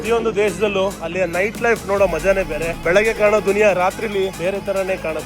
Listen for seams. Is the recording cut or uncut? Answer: cut